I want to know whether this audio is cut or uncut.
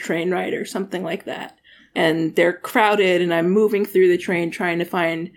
cut